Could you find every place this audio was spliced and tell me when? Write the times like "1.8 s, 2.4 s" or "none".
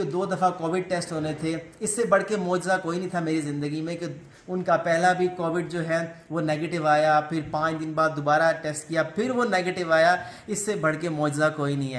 none